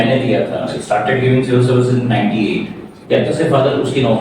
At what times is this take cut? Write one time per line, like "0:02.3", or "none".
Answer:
0:02.9